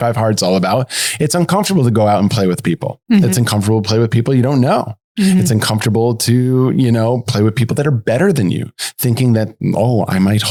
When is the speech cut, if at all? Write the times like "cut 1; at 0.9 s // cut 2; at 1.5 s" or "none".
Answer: none

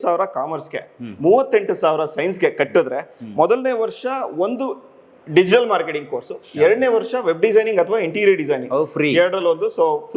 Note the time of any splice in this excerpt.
none

